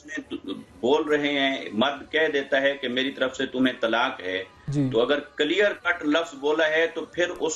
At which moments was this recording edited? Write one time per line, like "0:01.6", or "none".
none